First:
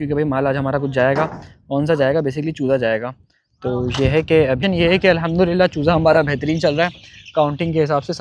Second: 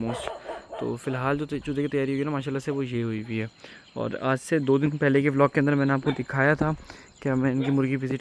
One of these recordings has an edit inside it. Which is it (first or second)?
first